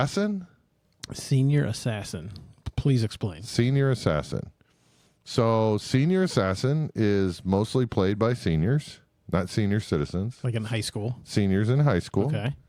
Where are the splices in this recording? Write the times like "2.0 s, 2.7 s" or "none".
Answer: none